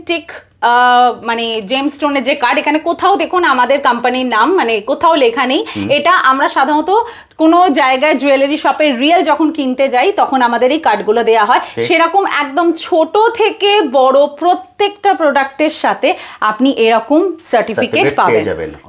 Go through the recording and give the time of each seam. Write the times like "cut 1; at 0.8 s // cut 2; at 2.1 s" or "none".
none